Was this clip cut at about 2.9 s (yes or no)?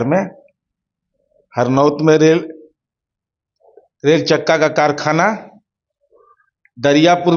no